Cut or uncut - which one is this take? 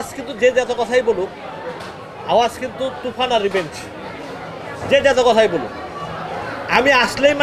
uncut